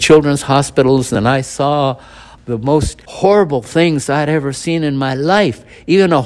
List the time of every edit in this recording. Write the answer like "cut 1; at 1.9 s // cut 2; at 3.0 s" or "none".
cut 1; at 1.1 s // cut 2; at 3.0 s